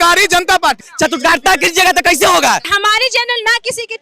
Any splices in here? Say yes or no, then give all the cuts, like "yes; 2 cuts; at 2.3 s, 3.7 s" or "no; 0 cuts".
yes; 2 cuts; at 0.9 s, 2.7 s